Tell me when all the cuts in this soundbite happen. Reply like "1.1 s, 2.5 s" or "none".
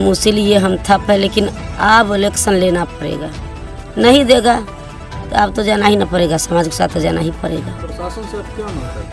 none